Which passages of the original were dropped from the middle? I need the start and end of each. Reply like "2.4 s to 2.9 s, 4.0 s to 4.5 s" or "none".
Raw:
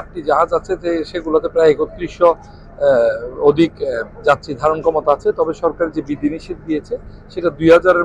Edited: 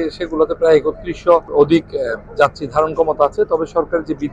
2.4 s to 3.3 s